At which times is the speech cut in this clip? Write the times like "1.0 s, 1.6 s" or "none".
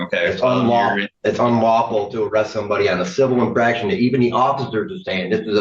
1.1 s

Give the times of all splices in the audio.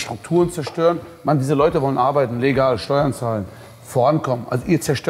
none

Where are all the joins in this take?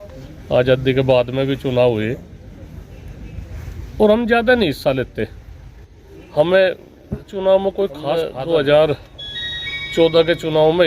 8.3 s

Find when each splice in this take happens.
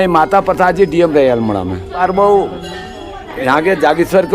2.0 s

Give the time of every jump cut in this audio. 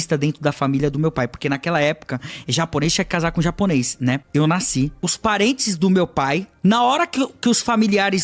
4.2 s, 4.9 s, 6.5 s

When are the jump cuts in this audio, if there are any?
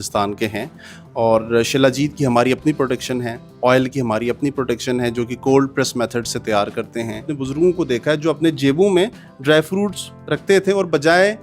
7.3 s

